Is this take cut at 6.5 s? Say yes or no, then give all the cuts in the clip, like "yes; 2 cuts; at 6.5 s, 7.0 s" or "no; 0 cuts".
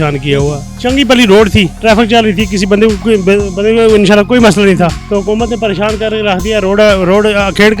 no; 2 cuts; at 1.7 s, 5.0 s